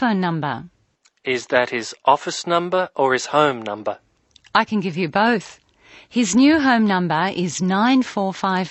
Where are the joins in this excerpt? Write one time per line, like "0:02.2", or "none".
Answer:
none